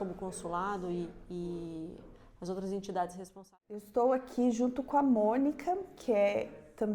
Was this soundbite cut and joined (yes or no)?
yes